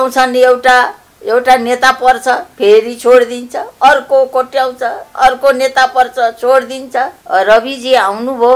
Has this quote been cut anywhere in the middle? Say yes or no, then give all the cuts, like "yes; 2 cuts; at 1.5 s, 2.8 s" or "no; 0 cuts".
yes; 1 cut; at 7.2 s